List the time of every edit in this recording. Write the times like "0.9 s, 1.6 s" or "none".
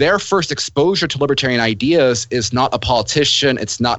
none